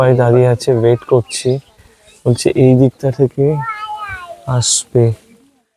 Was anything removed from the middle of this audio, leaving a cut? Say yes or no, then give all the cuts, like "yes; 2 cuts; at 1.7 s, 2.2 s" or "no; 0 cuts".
no; 0 cuts